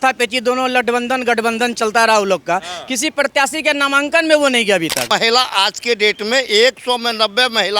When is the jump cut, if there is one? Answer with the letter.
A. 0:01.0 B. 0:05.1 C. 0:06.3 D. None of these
B